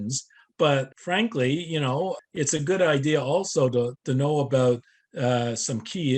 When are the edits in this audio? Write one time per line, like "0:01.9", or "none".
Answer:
0:01.0
0:02.2
0:04.0